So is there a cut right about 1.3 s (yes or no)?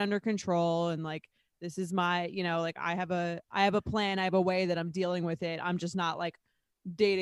no